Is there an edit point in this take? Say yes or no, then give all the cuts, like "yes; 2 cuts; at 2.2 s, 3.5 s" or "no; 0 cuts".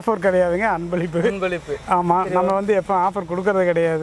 no; 0 cuts